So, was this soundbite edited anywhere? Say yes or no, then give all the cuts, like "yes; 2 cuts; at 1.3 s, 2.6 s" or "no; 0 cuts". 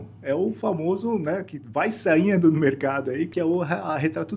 yes; 1 cut; at 3.3 s